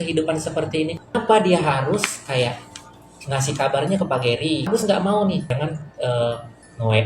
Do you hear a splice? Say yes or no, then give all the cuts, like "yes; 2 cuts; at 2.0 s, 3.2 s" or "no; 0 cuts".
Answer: yes; 3 cuts; at 1.1 s, 4.7 s, 5.5 s